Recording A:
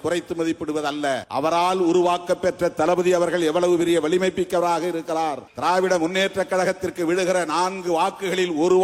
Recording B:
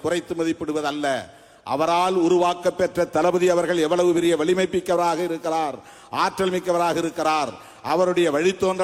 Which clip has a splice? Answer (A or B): A